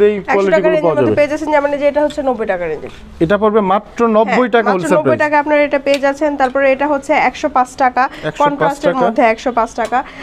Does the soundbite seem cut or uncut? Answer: uncut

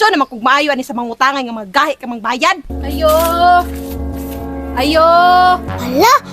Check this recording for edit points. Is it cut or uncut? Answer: cut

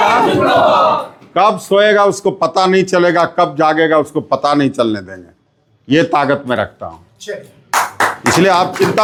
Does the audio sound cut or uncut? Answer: uncut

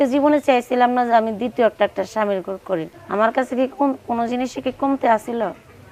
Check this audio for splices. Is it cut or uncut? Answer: cut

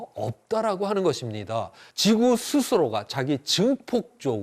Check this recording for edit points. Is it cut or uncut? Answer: cut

